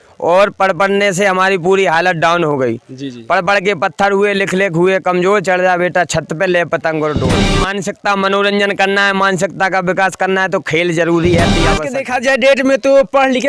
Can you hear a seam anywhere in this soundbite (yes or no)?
yes